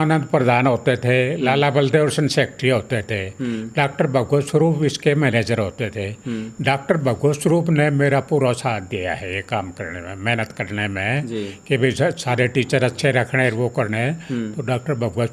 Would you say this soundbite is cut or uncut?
uncut